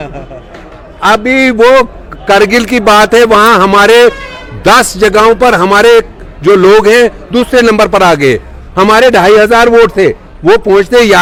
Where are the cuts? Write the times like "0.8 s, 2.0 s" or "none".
none